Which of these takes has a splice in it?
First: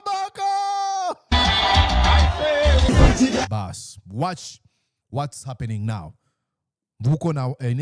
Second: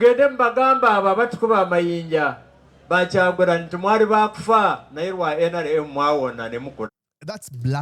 first; 1 cut; at 2.9 s

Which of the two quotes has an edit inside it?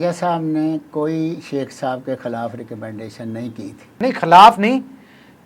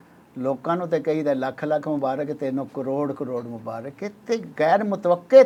first; 1 cut; at 3.9 s

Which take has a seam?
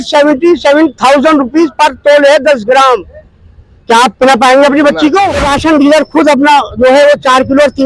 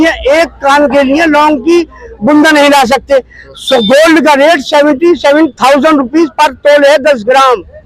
first; 1 cut; at 5.4 s

